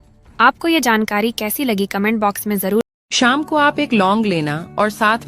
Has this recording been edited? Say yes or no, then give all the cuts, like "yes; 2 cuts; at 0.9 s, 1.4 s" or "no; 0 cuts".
yes; 1 cut; at 2.9 s